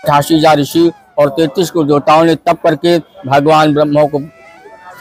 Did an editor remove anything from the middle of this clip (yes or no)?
no